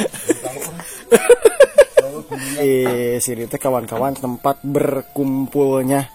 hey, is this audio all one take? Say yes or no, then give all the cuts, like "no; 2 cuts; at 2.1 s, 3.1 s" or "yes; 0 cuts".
no; 1 cut; at 2.6 s